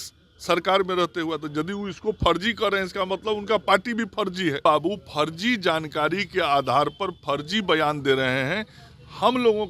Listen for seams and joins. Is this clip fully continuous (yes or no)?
no